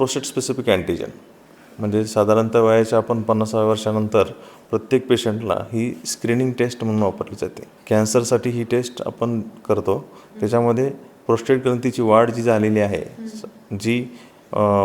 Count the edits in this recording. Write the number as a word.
one